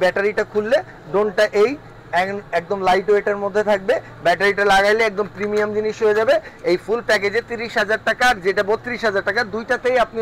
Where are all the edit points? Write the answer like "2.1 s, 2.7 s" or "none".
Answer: none